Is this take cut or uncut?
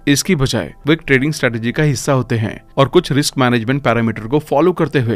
uncut